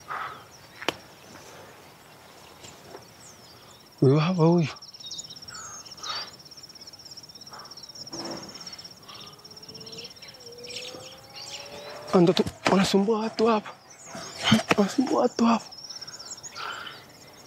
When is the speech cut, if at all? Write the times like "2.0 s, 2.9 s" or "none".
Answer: none